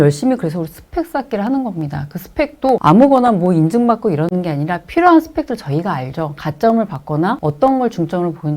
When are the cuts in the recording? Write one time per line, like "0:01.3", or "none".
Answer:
0:02.8
0:07.4